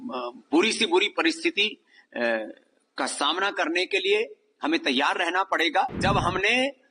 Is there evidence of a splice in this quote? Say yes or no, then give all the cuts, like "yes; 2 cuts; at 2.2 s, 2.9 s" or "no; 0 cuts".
yes; 1 cut; at 6.0 s